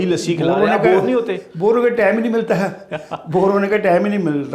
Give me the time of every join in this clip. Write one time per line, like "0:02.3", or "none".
none